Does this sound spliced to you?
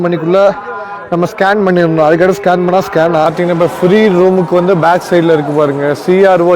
yes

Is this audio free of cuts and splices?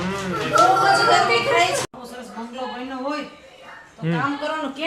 no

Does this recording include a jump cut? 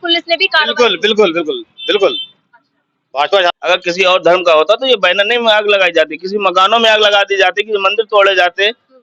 yes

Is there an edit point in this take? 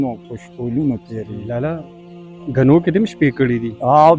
yes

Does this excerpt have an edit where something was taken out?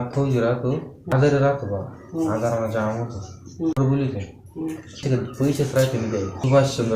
yes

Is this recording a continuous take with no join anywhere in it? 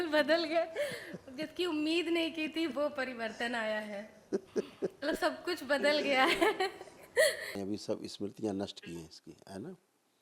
no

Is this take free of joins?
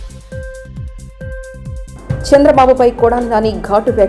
yes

